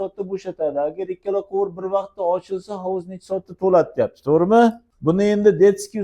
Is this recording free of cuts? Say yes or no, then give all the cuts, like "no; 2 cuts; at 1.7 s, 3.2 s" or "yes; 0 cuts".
no; 1 cut; at 4.9 s